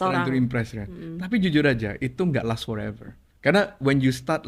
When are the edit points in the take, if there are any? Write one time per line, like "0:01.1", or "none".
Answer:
none